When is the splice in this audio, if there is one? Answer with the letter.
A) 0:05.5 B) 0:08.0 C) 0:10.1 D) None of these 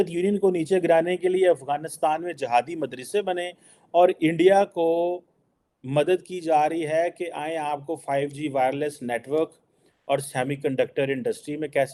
D